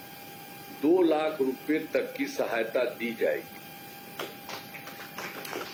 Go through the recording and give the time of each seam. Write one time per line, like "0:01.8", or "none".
none

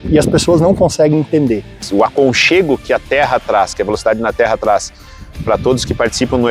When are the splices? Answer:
0:01.8

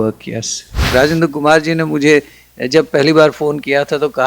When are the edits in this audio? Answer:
0:00.9

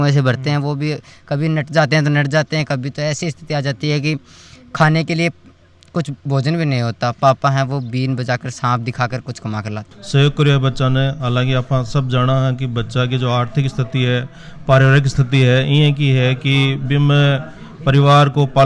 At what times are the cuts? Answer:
0:09.9

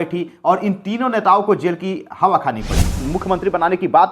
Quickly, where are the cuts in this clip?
0:03.0

